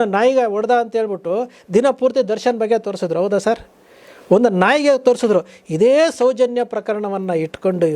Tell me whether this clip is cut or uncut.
uncut